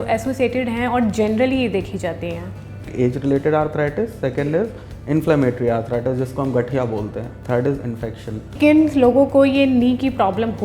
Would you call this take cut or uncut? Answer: cut